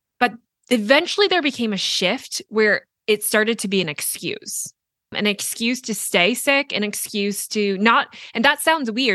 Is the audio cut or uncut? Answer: cut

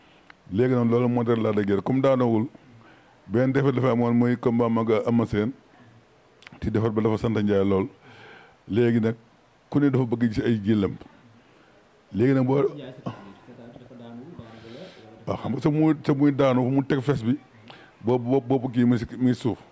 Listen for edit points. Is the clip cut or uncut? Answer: uncut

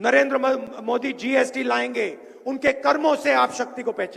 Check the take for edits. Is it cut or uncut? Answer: uncut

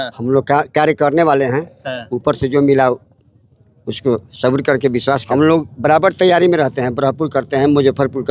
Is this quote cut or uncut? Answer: cut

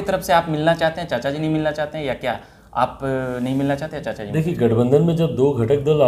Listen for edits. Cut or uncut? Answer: uncut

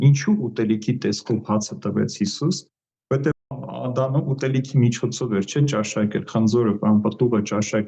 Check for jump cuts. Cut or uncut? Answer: uncut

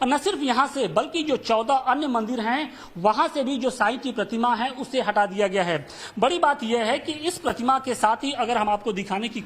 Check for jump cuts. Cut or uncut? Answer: cut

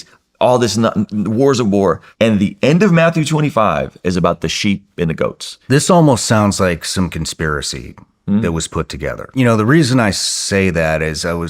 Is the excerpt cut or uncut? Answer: cut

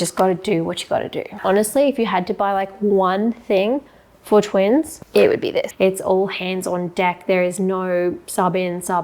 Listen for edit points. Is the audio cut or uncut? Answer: cut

